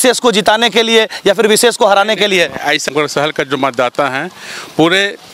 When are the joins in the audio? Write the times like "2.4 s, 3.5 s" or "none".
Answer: 2.9 s